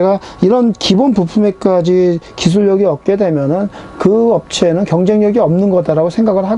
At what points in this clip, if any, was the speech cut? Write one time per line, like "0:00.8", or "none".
none